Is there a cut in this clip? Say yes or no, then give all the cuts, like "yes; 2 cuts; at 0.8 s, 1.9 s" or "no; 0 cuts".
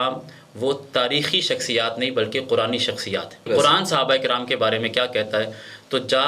yes; 1 cut; at 3.5 s